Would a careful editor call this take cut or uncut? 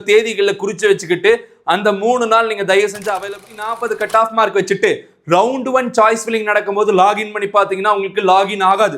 cut